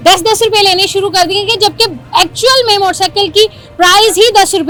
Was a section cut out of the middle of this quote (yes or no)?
no